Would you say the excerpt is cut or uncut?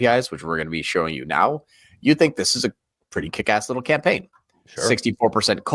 uncut